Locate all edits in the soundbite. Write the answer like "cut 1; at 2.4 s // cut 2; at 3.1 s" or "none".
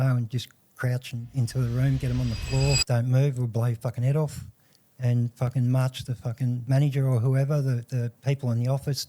cut 1; at 2.8 s // cut 2; at 6.6 s // cut 3; at 8.1 s